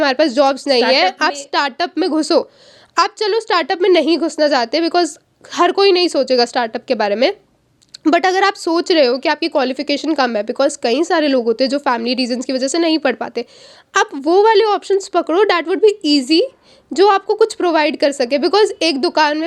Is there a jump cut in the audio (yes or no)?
no